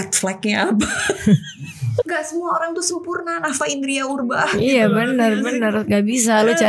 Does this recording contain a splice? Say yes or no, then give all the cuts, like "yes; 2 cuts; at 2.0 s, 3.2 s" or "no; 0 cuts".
yes; 1 cut; at 2.1 s